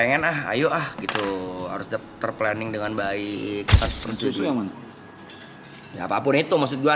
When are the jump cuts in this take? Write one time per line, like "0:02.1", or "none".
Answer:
0:03.9